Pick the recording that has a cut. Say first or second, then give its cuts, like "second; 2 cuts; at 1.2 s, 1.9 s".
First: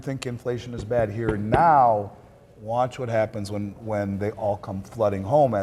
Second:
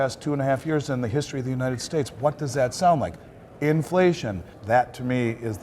second; 1 cut; at 4.5 s